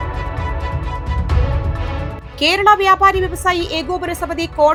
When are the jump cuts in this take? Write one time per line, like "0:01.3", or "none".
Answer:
none